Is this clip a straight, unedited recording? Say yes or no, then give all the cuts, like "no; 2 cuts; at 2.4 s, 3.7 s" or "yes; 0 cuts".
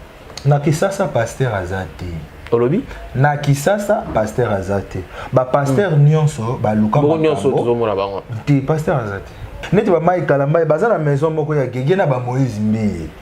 no; 1 cut; at 9.5 s